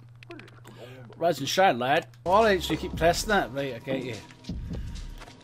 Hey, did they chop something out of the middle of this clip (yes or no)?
yes